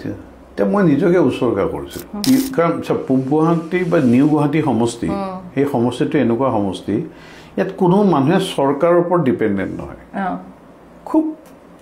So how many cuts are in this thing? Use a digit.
1